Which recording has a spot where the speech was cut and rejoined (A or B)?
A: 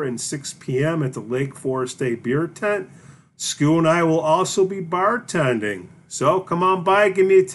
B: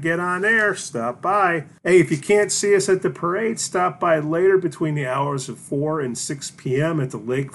B